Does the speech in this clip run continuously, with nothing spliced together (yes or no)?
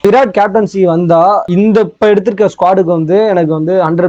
no